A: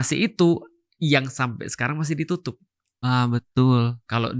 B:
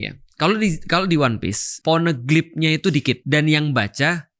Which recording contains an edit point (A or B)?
B